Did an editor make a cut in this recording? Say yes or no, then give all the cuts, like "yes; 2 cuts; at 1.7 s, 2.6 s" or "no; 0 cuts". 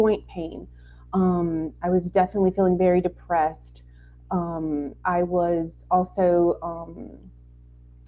no; 0 cuts